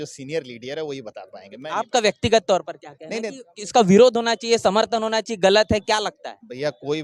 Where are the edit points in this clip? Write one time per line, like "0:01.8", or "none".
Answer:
none